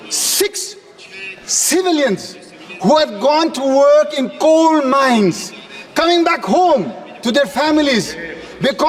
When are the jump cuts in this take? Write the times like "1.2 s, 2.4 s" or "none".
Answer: none